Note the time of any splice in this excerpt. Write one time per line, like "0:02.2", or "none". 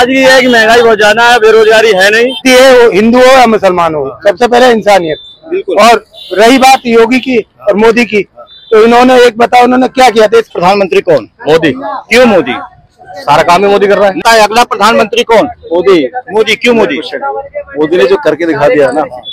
0:02.4
0:10.5
0:14.2